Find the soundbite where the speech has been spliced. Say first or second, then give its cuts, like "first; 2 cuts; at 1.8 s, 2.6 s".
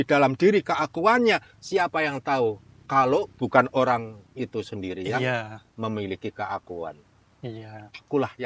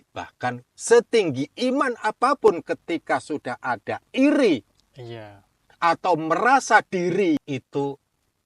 second; 1 cut; at 7.4 s